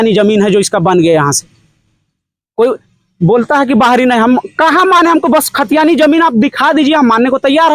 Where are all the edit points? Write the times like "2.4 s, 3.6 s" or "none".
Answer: none